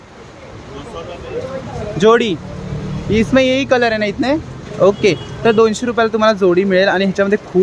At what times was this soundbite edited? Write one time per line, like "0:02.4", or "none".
none

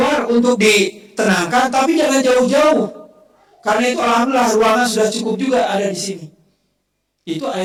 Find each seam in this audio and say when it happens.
none

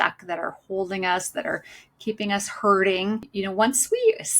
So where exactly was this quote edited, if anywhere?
0:03.3

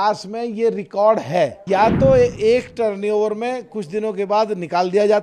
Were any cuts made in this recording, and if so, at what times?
0:01.6

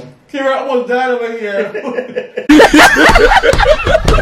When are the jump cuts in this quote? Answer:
0:02.4

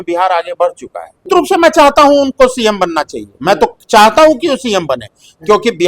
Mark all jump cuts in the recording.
0:01.3

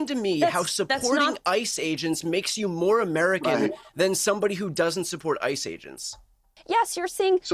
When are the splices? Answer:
0:06.6

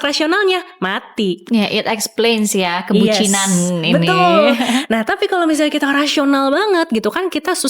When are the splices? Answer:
none

